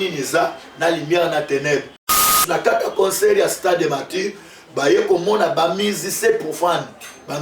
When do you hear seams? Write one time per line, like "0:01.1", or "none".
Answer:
0:02.2